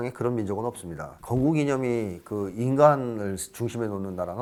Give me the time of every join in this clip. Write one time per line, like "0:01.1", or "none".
none